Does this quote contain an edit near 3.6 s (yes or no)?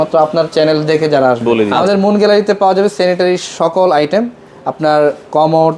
no